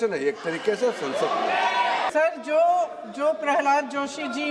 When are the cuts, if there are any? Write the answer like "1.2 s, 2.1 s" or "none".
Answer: 2.1 s